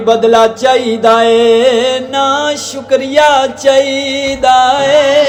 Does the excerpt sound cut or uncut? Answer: uncut